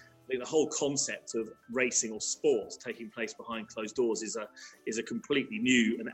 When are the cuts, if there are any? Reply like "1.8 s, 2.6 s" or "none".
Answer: none